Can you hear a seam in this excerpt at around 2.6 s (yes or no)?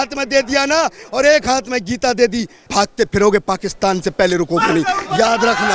yes